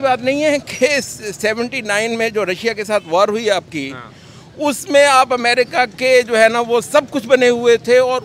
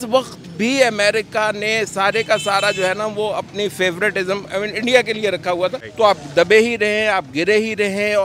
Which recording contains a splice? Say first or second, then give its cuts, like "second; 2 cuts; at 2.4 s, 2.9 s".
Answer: second; 1 cut; at 5.8 s